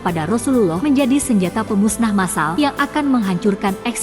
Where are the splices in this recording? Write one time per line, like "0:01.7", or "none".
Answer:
0:00.8
0:02.5